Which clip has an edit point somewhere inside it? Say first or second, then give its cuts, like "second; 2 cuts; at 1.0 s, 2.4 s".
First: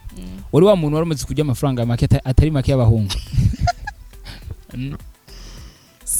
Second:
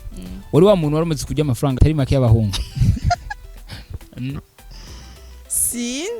second; 1 cut; at 1.8 s